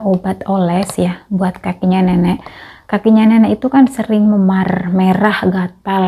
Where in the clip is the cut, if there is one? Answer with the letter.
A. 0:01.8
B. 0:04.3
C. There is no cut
C